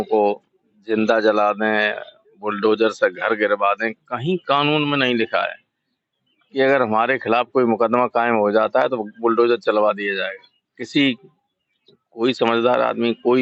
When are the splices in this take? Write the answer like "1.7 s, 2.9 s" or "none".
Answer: none